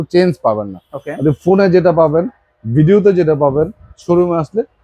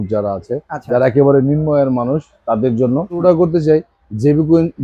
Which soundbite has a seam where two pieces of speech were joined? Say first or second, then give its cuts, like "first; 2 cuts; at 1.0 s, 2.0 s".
second; 1 cut; at 3.2 s